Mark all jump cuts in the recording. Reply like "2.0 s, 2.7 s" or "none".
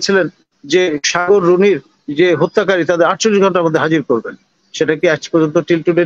none